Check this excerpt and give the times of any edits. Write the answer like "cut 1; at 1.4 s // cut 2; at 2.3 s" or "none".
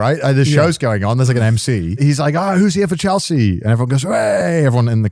cut 1; at 2.0 s